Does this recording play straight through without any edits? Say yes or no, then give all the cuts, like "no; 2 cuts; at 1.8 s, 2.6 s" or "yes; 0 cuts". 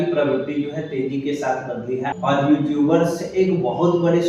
no; 1 cut; at 2.1 s